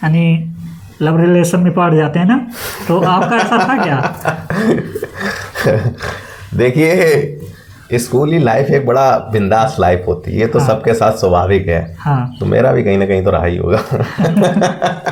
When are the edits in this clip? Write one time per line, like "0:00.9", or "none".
none